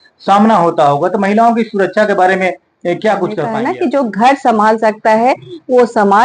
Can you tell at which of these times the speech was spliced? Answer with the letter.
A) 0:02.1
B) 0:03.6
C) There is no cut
B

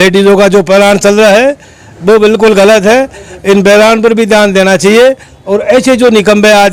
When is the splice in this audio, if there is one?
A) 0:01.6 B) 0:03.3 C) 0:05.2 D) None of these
D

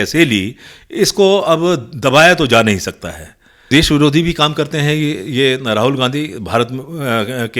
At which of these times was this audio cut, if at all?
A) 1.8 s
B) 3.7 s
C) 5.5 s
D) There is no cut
B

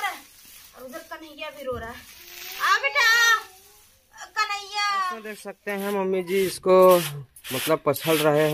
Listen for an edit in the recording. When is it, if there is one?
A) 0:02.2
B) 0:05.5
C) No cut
B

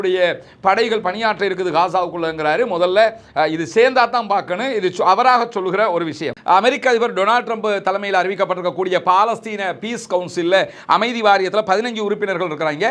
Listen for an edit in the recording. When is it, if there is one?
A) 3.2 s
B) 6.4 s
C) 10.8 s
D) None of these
B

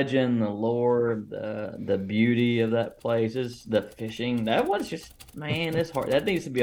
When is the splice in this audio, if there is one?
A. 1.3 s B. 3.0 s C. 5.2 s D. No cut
D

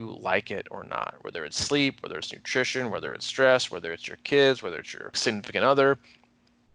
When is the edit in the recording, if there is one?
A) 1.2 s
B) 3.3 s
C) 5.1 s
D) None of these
C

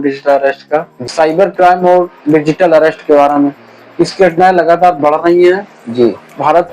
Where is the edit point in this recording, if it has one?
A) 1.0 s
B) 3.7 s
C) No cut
A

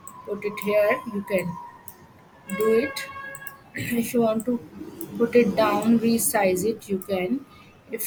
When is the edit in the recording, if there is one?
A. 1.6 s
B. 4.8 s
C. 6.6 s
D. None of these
D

